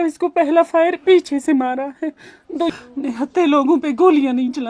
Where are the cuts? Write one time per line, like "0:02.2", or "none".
0:02.7